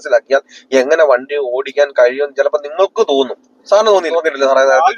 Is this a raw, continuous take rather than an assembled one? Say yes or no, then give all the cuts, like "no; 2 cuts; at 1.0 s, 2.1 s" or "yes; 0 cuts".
no; 2 cuts; at 3.5 s, 4.1 s